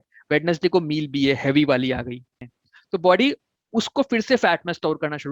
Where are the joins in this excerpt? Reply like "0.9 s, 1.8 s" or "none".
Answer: 2.5 s